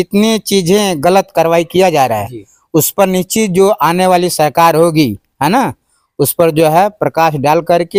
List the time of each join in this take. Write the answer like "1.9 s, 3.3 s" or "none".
none